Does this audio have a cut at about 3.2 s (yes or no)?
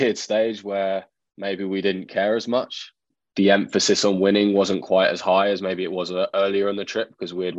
yes